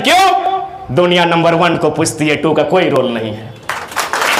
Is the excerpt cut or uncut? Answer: uncut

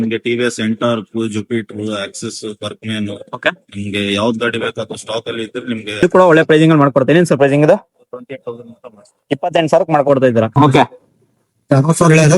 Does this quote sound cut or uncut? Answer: cut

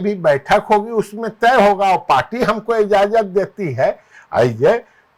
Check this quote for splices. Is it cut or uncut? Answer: uncut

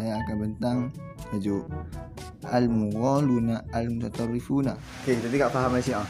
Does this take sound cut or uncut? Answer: cut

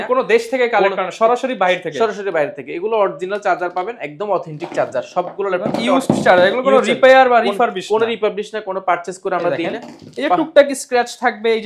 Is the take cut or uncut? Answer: uncut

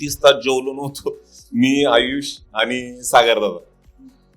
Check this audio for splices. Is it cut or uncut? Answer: uncut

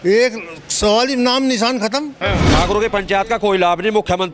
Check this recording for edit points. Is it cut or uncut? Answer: cut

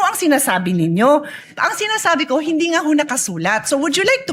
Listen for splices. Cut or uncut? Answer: uncut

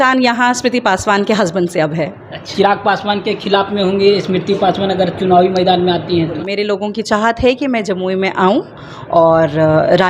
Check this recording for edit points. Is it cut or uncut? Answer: cut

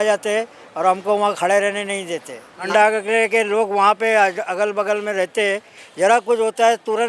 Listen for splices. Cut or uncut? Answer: cut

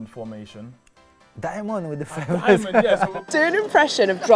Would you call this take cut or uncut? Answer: cut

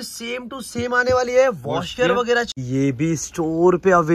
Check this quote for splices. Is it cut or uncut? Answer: cut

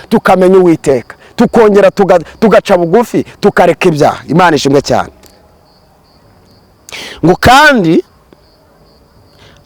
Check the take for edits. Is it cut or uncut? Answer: uncut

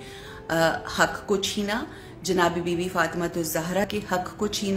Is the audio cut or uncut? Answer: cut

